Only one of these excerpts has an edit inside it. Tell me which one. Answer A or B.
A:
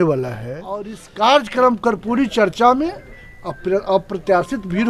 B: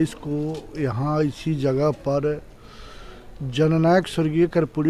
A